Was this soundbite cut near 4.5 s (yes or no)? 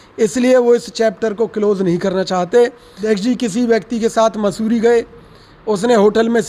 no